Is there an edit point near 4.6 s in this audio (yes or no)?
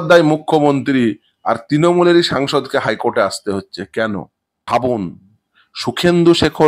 yes